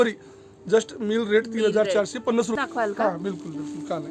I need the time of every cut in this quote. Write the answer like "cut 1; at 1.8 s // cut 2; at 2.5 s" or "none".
cut 1; at 2.6 s

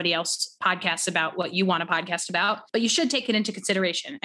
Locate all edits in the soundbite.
cut 1; at 2.6 s

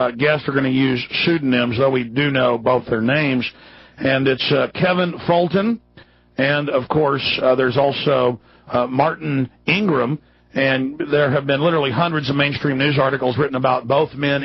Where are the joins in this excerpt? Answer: cut 1; at 2.7 s

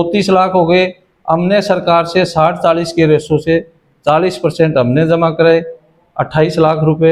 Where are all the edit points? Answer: none

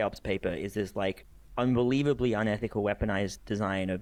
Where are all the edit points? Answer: none

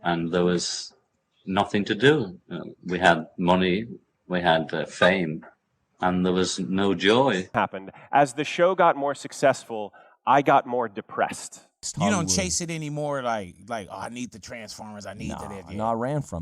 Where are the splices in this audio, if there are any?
cut 1; at 7.5 s // cut 2; at 11.9 s

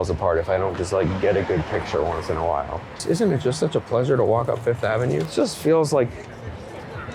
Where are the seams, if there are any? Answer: cut 1; at 3.0 s // cut 2; at 5.3 s

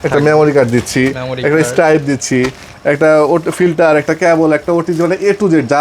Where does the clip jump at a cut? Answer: none

